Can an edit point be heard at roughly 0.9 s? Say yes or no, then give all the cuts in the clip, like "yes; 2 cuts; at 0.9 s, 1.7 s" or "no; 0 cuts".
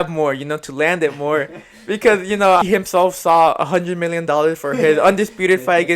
no; 1 cut; at 2.6 s